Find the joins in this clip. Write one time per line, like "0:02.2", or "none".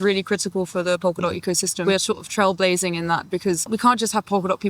0:01.8
0:03.6